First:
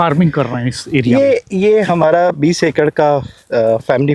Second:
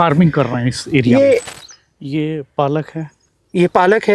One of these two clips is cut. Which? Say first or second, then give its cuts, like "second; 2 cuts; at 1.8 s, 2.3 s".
second; 1 cut; at 1.5 s